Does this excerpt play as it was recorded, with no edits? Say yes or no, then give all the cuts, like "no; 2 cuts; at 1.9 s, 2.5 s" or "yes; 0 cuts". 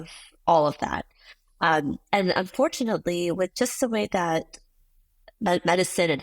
yes; 0 cuts